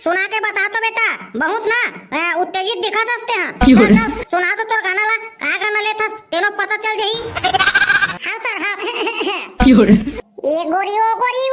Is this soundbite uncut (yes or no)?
no